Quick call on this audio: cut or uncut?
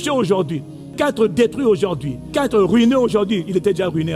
cut